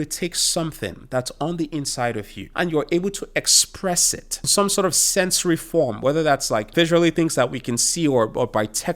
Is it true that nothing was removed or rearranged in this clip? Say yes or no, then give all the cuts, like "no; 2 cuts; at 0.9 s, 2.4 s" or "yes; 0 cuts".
no; 3 cuts; at 2.4 s, 4.5 s, 6.7 s